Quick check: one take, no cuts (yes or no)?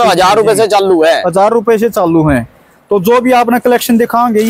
yes